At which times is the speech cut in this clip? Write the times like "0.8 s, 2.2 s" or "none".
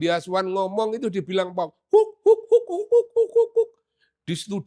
none